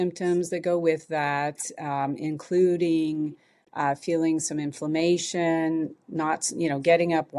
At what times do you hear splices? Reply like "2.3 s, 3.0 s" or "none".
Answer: none